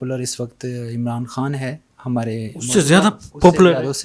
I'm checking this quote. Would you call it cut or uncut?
uncut